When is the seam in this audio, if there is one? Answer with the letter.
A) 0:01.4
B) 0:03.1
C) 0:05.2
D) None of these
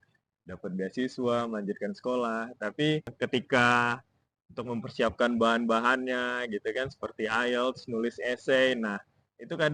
B